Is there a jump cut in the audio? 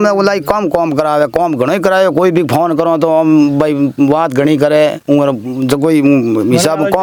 no; 0 cuts

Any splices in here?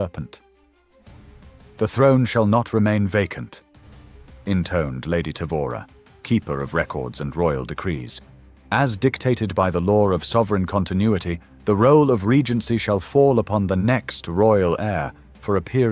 no; 0 cuts

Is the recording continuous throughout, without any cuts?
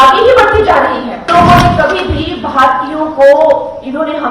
no; 1 cut; at 1.2 s

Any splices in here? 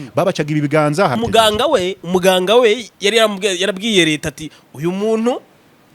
yes; 1 cut; at 1.1 s

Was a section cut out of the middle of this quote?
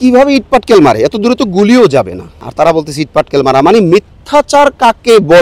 yes; 1 cut; at 2.4 s

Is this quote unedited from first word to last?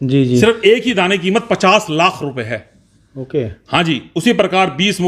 yes; 0 cuts

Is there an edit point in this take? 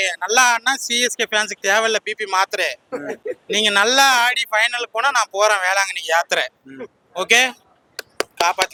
no; 0 cuts

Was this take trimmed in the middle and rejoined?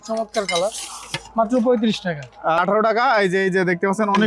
yes; 1 cut; at 2.6 s

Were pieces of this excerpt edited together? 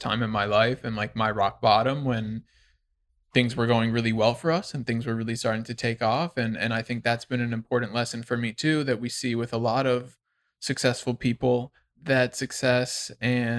no; 0 cuts

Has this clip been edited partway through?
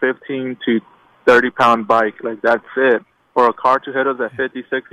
yes; 1 cut; at 3.2 s

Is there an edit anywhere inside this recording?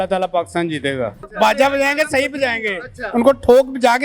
yes; 1 cut; at 1.2 s

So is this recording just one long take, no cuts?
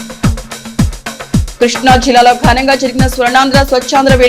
no; 1 cut; at 1.0 s

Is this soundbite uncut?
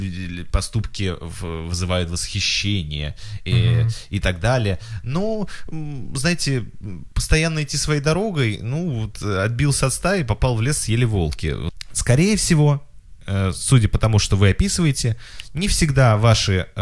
no; 1 cut; at 11.7 s

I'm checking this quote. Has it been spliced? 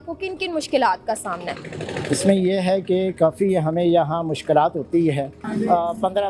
yes; 1 cut; at 5.4 s

